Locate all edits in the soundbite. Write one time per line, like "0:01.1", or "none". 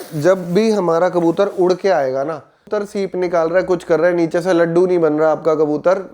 0:02.8